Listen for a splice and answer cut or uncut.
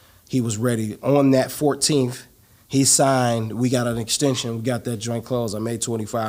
uncut